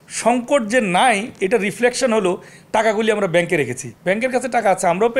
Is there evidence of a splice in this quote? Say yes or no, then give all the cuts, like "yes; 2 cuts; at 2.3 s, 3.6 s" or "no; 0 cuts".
yes; 1 cut; at 3.9 s